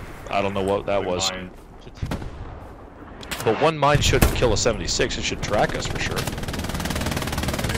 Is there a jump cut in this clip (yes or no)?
no